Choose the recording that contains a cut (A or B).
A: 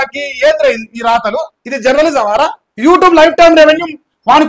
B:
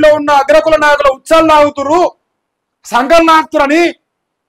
A